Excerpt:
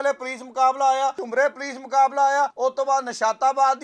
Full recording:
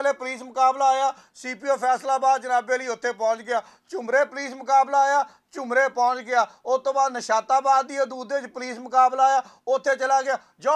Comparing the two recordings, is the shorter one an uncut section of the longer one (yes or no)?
no